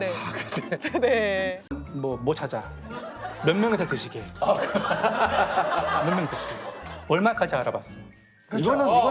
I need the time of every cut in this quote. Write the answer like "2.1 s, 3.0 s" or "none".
1.8 s

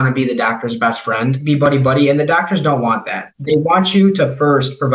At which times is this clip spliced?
1.4 s, 3.3 s

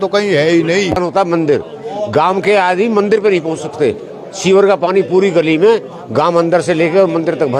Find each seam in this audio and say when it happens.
1.0 s

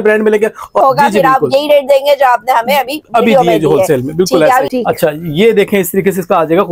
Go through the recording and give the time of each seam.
0.8 s, 4.7 s

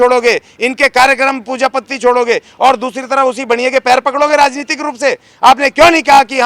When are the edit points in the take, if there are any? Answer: none

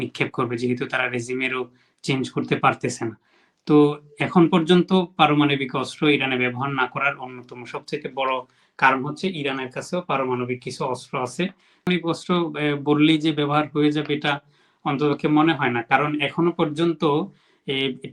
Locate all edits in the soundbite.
11.9 s

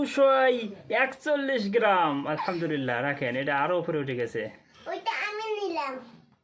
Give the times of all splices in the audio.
none

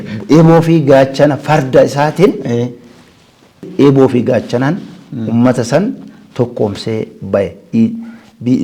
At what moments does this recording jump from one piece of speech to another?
3.7 s

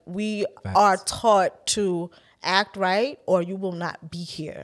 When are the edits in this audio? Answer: none

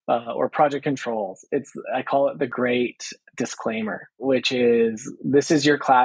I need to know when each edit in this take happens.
2.5 s, 4.1 s

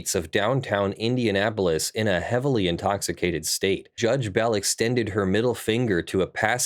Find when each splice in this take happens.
4.0 s

